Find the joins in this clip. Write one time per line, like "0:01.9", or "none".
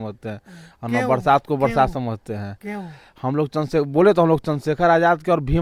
none